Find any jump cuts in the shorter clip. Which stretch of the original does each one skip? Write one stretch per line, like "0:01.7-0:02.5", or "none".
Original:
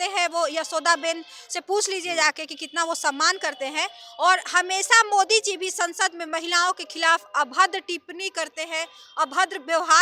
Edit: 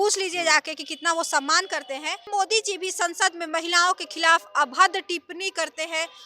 0:04.0-0:05.1